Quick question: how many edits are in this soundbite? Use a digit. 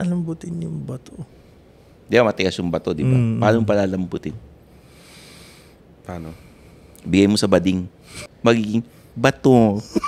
1